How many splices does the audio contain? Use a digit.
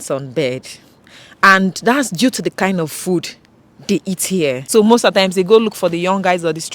1